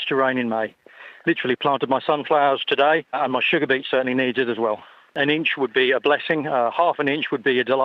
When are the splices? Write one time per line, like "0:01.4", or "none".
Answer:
0:01.0
0:03.1
0:05.2
0:06.7